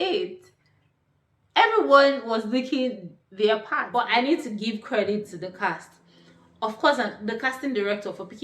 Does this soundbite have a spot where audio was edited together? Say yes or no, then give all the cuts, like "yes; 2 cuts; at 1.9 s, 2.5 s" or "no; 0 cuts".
yes; 1 cut; at 3.8 s